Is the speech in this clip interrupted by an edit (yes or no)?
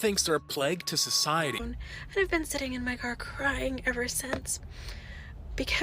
yes